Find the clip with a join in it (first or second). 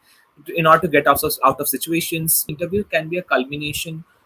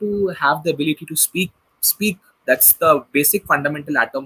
first